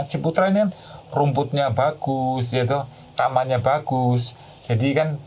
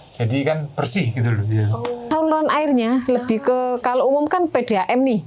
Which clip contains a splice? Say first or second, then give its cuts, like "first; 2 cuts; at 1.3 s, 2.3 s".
second; 1 cut; at 2.1 s